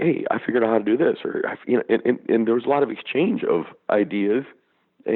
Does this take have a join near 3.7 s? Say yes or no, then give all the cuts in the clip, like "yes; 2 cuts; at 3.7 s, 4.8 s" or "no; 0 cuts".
yes; 1 cut; at 3.7 s